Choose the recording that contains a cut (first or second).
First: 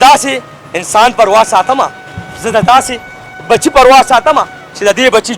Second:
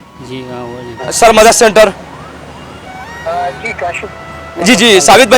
second